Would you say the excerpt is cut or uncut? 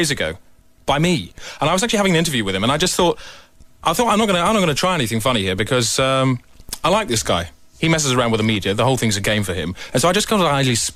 uncut